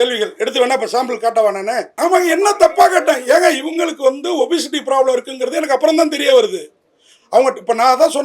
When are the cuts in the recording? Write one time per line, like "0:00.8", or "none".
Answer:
0:01.9